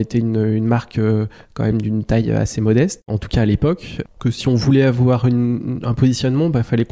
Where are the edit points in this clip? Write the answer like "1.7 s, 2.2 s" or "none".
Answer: none